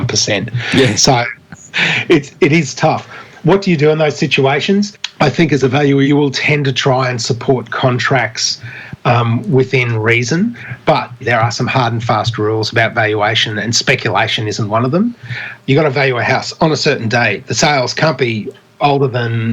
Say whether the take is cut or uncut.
cut